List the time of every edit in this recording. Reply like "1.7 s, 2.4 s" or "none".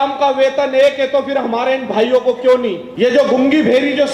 2.8 s